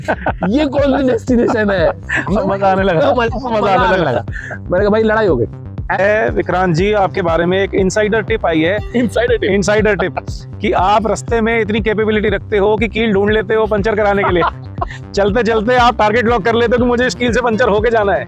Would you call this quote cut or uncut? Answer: cut